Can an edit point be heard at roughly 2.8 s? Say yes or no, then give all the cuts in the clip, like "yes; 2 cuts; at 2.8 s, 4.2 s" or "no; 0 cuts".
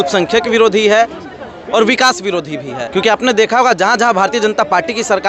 yes; 1 cut; at 2.8 s